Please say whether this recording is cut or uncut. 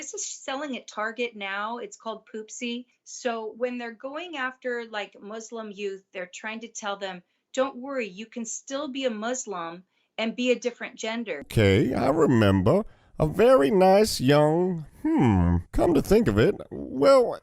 cut